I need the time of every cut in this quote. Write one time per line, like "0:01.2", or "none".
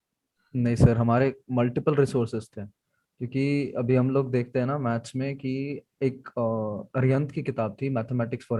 none